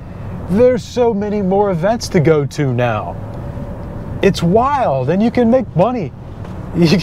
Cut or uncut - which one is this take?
uncut